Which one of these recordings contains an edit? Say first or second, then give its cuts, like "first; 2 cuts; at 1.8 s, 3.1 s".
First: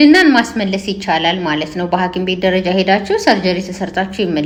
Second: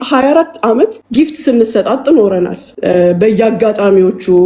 second; 2 cuts; at 1.0 s, 2.7 s